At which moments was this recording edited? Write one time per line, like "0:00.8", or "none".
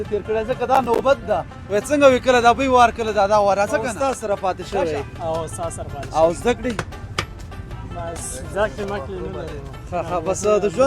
0:03.9